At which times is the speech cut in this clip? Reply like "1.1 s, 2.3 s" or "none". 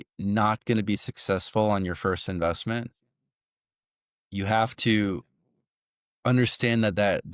none